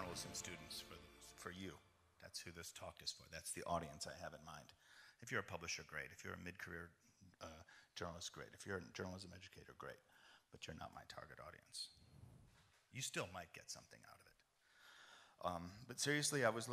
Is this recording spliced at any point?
yes; 1 cut; at 9.5 s

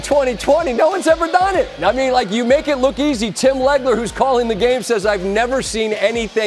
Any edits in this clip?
no; 0 cuts

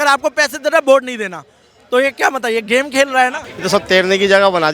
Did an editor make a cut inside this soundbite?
yes; 1 cut; at 3.4 s

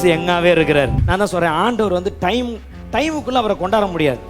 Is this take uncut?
no; 1 cut; at 1.0 s

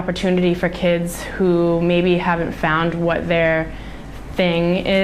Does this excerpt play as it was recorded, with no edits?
yes; 0 cuts

